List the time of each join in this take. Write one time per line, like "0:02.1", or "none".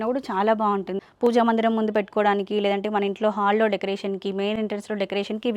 0:00.9